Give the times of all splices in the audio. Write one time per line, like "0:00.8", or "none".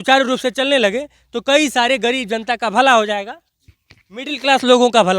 none